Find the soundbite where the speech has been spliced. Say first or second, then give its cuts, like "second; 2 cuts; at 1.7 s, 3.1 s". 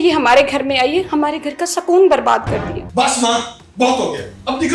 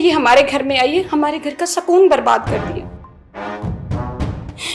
first; 1 cut; at 2.9 s